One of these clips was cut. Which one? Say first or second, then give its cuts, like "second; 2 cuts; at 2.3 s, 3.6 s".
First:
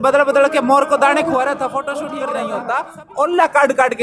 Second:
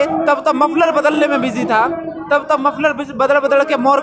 first; 1 cut; at 2.2 s